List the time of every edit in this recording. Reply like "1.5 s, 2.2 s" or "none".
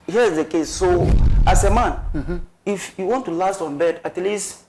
1.3 s